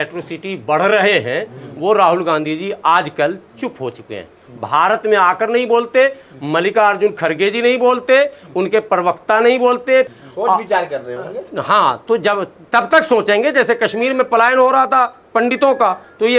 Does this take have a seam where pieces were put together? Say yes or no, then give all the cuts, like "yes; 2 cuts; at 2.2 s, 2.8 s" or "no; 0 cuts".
no; 0 cuts